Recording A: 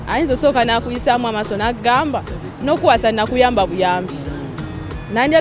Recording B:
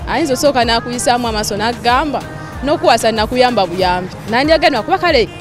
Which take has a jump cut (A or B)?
B